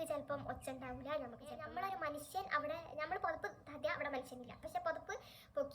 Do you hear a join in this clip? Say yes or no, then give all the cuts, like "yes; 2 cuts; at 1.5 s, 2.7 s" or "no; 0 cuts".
yes; 1 cut; at 1.5 s